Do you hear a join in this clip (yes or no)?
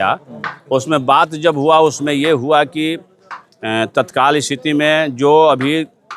no